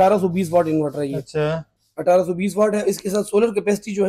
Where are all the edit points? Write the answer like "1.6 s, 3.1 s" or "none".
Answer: none